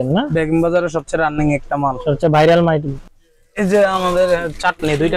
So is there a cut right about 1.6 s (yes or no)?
no